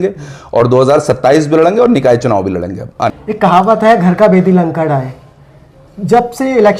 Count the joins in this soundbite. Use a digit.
1